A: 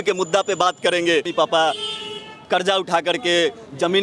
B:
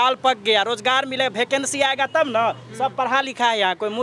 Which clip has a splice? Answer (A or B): A